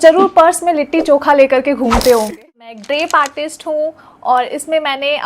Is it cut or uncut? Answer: cut